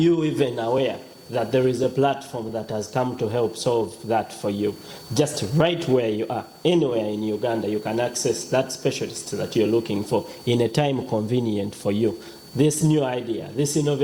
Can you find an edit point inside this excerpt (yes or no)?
no